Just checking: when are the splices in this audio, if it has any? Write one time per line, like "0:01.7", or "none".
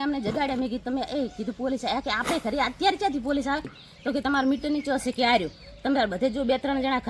0:03.8